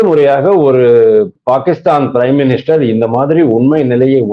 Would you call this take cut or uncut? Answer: uncut